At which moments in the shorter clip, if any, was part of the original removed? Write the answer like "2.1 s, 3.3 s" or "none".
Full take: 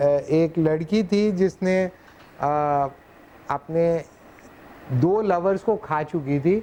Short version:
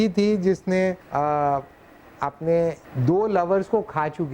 1.0 s, 2.9 s